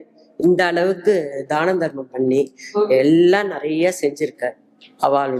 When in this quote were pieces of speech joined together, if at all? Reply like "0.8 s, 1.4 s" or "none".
none